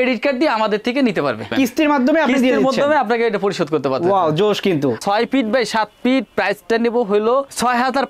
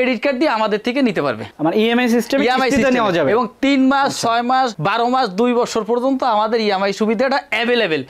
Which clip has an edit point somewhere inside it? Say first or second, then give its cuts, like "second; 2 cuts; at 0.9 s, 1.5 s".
first; 2 cuts; at 1.5 s, 5.0 s